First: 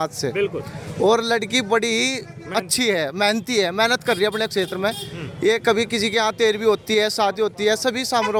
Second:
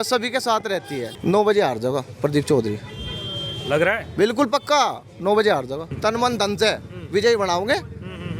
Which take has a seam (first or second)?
second